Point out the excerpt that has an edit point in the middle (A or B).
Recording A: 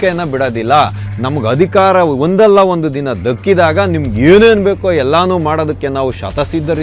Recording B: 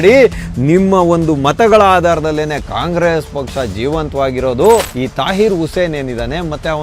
B